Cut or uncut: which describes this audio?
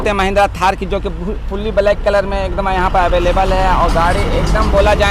uncut